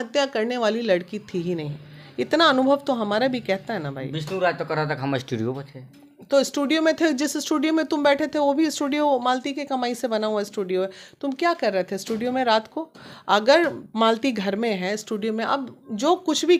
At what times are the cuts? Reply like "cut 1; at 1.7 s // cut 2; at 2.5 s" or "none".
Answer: none